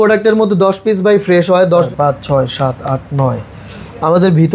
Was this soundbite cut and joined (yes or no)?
yes